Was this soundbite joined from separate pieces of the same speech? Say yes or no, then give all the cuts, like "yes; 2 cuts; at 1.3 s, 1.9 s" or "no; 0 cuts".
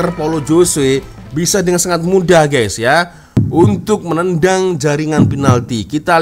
no; 0 cuts